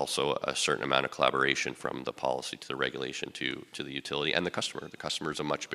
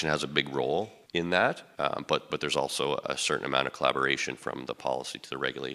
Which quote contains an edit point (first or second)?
second